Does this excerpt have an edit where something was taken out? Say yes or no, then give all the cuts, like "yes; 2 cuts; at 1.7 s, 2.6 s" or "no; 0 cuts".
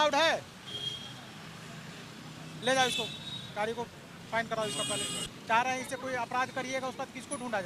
yes; 1 cut; at 5.3 s